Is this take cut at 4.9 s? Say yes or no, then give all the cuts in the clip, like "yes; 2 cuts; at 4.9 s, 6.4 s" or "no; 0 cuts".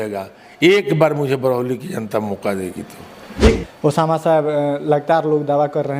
no; 1 cut; at 3.6 s